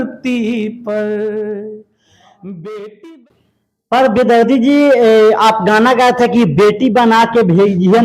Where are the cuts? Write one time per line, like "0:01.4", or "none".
0:03.2